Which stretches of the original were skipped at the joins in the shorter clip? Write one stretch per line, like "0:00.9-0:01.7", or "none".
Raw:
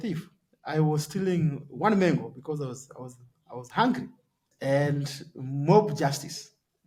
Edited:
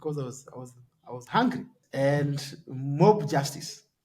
0:04.2-0:04.4